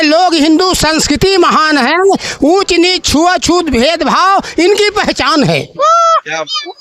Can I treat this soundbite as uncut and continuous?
yes; 0 cuts

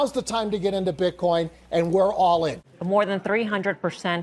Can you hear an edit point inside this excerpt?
yes; 1 cut; at 2.6 s

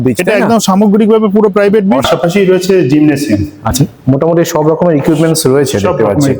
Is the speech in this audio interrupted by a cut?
yes; 2 cuts; at 2.1 s, 3.7 s

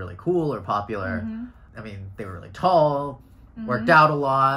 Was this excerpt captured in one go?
no; 1 cut; at 1.6 s

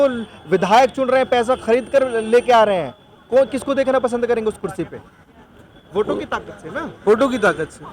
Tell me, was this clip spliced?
no; 0 cuts

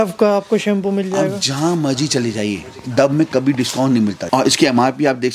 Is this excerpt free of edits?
yes; 0 cuts

